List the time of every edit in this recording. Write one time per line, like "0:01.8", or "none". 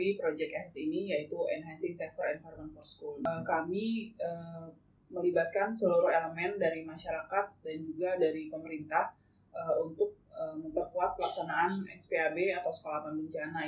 0:03.2